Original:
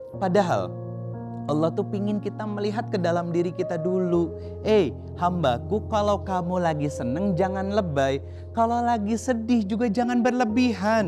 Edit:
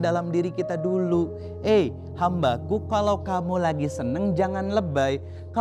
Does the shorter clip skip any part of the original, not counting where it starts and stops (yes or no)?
no